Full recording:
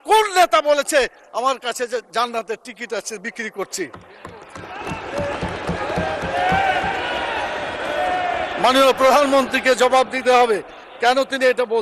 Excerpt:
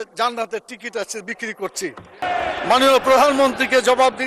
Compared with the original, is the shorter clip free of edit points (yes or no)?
no